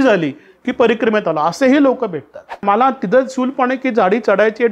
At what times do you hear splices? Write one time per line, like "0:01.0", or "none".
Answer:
0:02.6